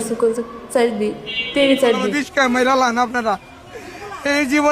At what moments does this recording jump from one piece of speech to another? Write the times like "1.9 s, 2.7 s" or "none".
2.1 s